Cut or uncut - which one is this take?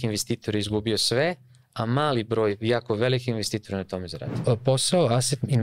cut